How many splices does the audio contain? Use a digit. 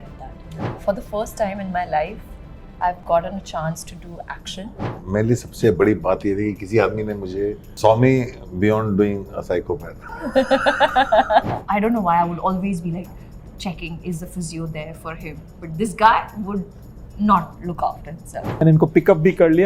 4